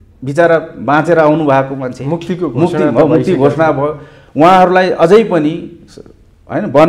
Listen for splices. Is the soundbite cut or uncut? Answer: uncut